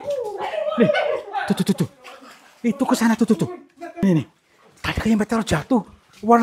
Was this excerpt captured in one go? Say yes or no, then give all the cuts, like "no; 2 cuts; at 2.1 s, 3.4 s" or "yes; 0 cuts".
no; 1 cut; at 4.0 s